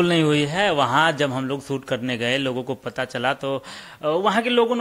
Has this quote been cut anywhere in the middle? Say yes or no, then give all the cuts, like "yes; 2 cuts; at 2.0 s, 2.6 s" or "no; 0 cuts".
no; 0 cuts